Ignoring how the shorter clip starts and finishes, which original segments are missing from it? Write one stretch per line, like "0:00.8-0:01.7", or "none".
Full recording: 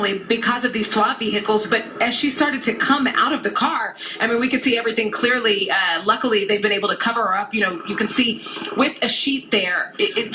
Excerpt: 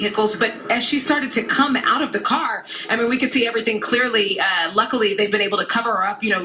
none